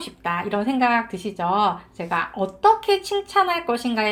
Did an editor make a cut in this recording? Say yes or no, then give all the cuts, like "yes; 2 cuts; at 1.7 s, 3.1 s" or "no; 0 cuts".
no; 0 cuts